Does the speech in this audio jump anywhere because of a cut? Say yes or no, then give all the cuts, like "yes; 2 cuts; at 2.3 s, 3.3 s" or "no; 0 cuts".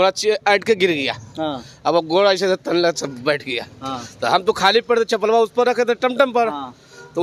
no; 0 cuts